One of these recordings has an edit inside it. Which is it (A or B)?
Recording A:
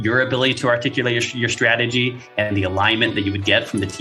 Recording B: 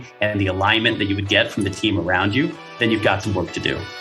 B